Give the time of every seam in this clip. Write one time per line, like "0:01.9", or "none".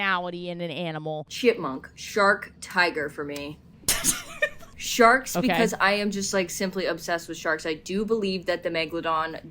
0:01.3
0:03.7
0:04.7